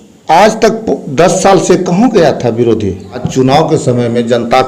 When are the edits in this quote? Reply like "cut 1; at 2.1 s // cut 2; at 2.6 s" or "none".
cut 1; at 3.3 s